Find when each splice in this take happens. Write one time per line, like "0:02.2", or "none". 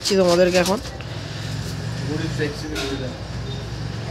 none